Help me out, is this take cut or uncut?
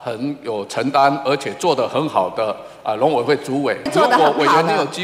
cut